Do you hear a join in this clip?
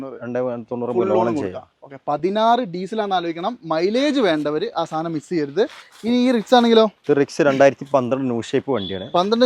no; 0 cuts

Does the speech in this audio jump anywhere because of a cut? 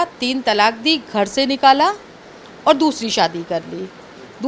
no; 0 cuts

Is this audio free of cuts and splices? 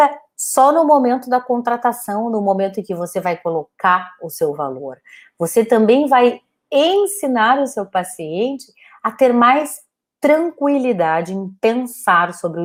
yes; 0 cuts

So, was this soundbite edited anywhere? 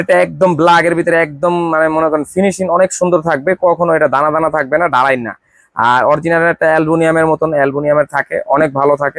no; 0 cuts

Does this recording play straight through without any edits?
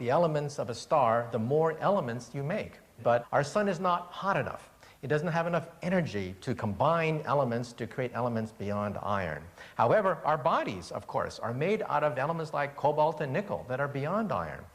no; 1 cut; at 11.4 s

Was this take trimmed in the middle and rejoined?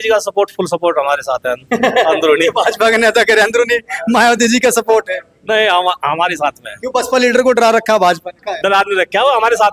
yes; 1 cut; at 8.6 s

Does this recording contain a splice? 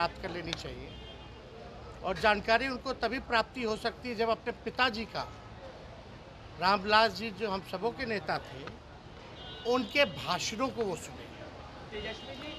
no; 0 cuts

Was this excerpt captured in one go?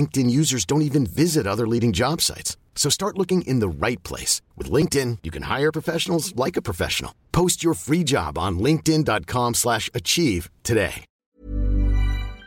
no; 1 cut; at 11.2 s

